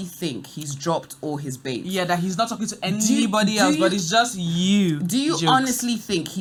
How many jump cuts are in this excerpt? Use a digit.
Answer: 0